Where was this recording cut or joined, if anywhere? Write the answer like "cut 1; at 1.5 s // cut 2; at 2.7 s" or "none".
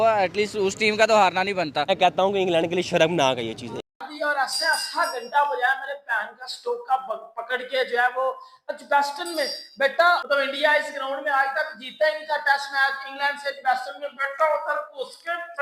cut 1; at 3.9 s // cut 2; at 10.2 s

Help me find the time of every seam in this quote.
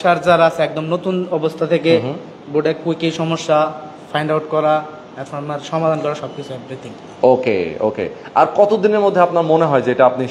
none

